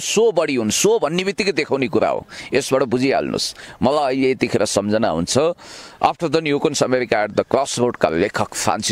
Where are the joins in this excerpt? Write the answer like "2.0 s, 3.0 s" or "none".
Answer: none